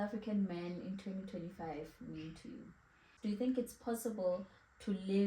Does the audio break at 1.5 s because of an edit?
no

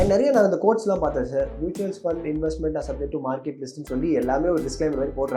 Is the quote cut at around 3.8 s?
no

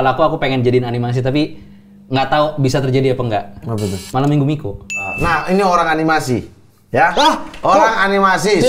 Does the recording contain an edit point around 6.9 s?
no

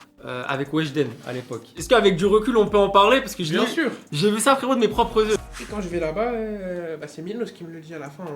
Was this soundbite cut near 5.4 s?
yes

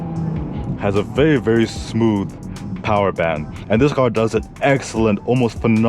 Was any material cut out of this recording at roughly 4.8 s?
no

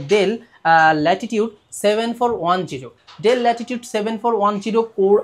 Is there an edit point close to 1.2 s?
no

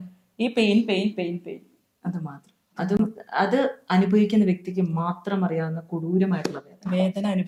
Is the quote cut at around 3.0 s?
no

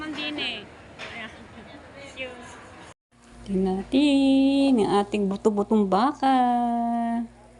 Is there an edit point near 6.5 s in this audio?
no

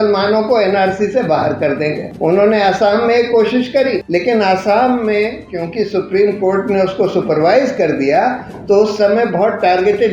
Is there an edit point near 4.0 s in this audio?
yes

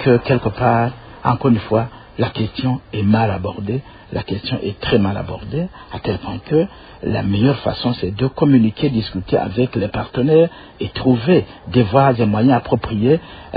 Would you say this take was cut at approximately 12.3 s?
no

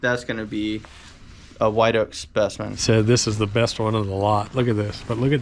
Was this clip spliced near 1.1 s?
no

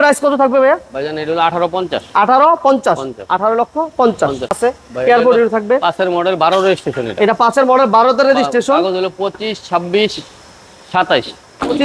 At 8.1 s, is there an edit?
no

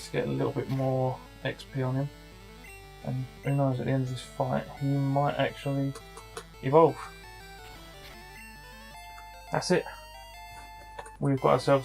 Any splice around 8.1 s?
yes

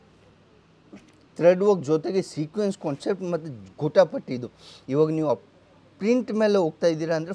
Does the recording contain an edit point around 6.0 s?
no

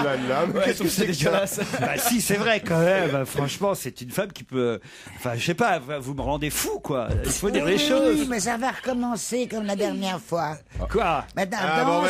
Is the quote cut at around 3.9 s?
yes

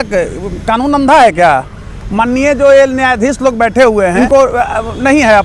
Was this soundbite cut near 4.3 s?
yes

